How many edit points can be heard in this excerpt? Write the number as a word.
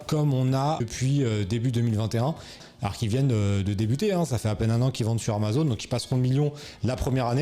one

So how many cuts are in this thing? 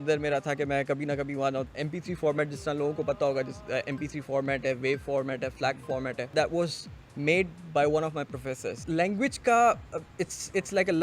three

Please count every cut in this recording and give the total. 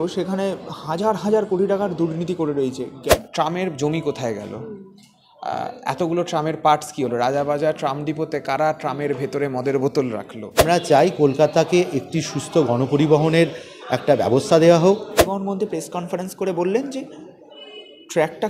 three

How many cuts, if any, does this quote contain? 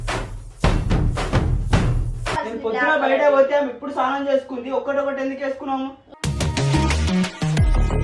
one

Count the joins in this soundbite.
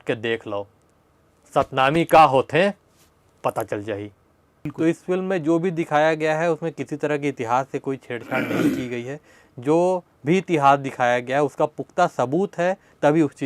one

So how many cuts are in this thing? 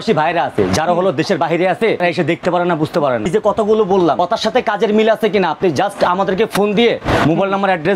three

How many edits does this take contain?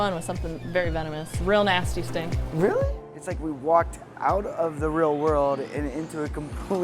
two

